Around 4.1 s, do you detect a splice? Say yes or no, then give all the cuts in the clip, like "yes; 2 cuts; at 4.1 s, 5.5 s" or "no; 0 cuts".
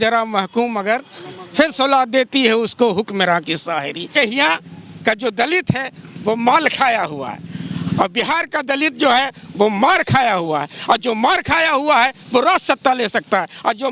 yes; 1 cut; at 4.1 s